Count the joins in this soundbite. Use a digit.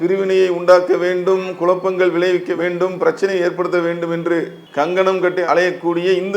1